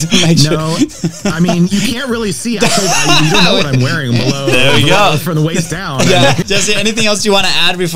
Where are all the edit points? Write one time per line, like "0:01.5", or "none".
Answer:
0:06.4